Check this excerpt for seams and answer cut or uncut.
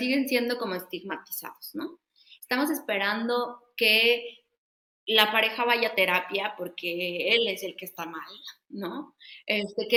uncut